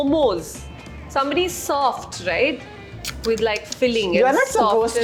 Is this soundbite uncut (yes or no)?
yes